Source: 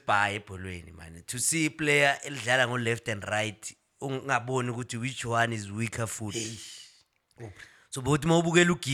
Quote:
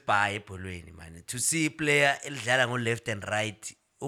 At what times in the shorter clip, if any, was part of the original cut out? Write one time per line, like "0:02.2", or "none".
none

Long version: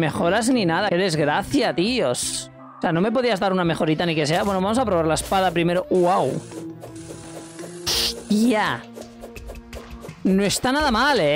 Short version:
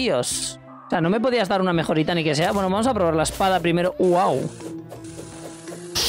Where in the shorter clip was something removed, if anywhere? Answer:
none

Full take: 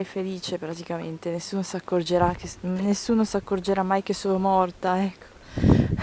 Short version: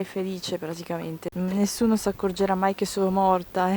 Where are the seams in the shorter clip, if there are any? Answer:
0:01.2

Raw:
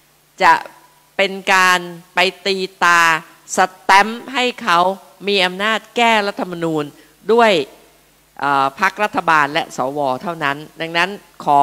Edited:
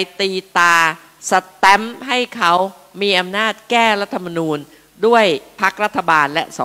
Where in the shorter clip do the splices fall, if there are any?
0:05.6

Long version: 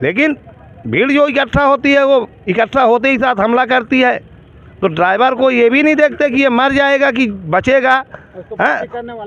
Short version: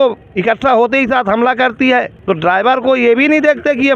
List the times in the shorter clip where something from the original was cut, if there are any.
0:02.1

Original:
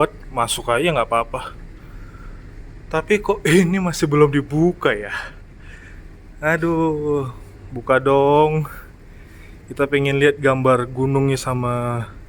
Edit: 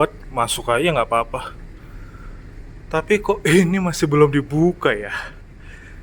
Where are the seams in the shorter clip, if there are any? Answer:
none

